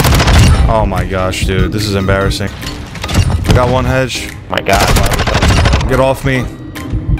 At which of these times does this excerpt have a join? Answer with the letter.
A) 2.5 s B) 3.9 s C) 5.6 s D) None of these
A